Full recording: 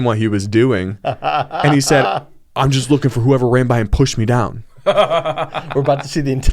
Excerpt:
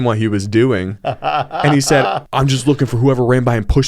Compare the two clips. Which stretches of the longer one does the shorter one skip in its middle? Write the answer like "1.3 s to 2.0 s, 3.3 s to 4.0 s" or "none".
2.2 s to 2.5 s

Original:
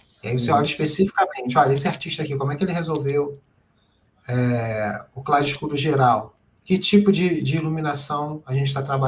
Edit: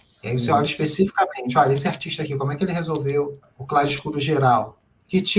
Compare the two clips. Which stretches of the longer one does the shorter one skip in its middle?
3.5 s to 5.1 s

